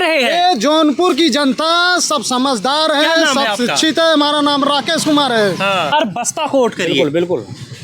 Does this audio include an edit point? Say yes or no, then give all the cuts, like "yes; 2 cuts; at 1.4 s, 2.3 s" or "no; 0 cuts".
yes; 1 cut; at 5.9 s